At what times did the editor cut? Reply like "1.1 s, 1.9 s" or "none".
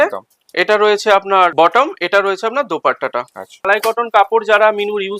1.5 s, 3.7 s